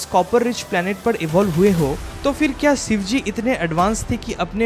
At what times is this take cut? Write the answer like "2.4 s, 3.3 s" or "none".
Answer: 2.1 s